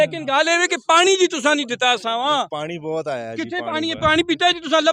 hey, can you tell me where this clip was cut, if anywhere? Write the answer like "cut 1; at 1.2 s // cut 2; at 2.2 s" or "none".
none